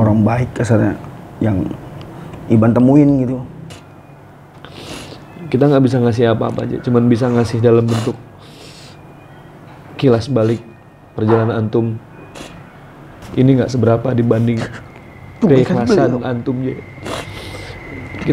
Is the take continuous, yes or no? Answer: no